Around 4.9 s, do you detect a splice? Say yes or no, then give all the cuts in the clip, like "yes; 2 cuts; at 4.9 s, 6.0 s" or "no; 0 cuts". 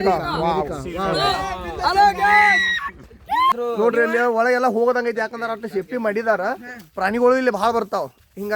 no; 1 cut; at 3.5 s